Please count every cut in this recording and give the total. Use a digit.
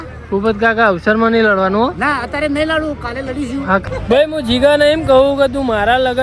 1